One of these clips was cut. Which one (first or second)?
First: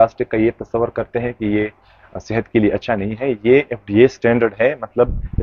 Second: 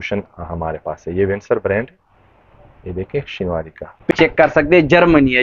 second